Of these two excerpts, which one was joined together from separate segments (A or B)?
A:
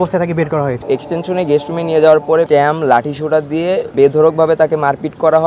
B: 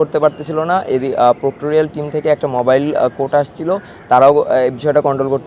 A